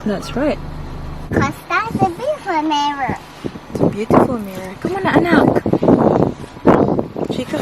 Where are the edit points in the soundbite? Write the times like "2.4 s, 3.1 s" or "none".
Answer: 1.3 s